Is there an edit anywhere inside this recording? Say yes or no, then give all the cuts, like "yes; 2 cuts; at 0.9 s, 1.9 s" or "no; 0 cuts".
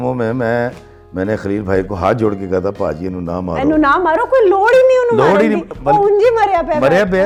no; 0 cuts